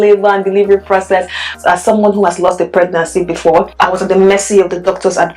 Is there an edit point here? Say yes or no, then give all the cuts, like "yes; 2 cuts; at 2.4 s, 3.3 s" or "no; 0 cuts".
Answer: yes; 2 cuts; at 1.5 s, 3.8 s